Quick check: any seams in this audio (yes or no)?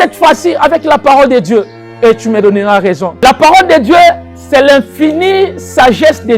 yes